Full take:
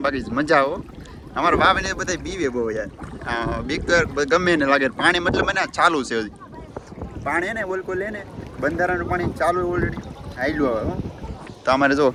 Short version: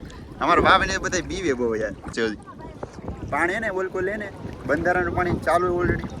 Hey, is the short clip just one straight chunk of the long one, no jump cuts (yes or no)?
no